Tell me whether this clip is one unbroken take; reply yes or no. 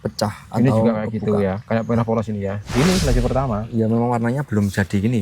no